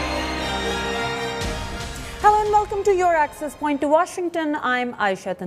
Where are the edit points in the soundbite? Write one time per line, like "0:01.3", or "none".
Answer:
none